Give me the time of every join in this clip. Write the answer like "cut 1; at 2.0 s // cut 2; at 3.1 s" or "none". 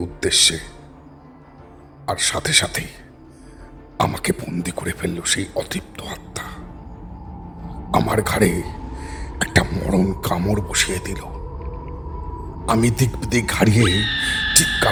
none